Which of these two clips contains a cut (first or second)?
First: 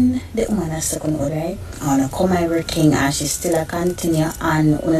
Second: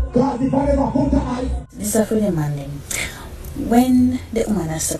second